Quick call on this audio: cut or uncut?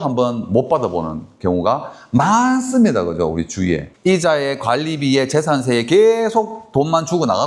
cut